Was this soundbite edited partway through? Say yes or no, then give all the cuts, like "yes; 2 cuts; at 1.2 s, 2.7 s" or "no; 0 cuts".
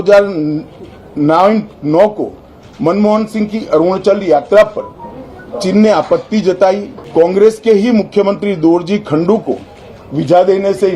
yes; 1 cut; at 6.9 s